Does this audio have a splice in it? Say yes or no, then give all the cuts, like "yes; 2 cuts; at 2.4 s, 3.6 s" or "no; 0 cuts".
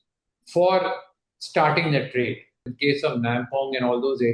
yes; 1 cut; at 2.7 s